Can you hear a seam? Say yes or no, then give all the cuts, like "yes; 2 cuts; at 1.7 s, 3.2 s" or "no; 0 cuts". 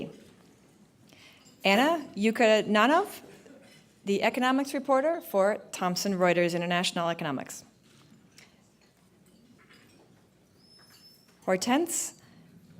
yes; 1 cut; at 2.6 s